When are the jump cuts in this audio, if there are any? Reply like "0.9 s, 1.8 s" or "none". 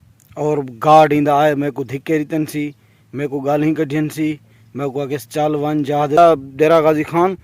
6.2 s